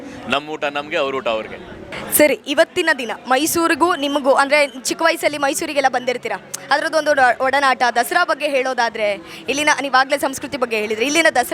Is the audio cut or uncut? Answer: uncut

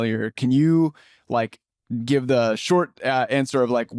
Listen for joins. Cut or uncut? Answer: uncut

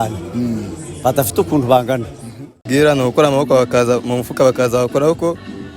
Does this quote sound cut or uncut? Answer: cut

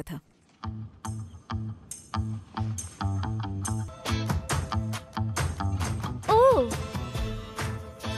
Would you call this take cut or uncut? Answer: cut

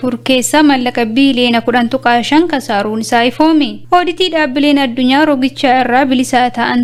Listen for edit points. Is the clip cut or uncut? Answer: uncut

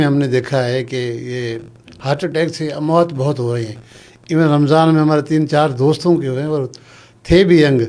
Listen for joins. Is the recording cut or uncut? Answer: uncut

